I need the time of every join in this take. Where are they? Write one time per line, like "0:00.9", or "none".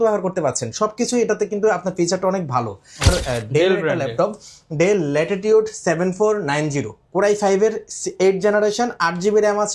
0:03.1

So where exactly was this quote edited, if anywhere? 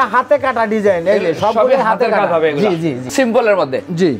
0:03.1

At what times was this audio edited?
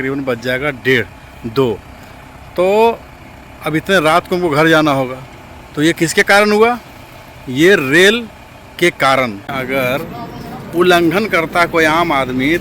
0:09.5

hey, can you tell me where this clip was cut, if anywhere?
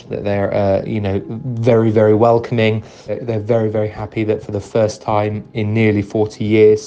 0:03.1

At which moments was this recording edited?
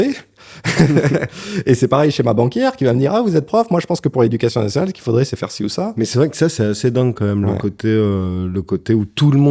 0:06.0

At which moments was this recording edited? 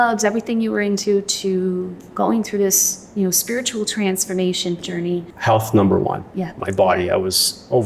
0:04.8
0:06.6

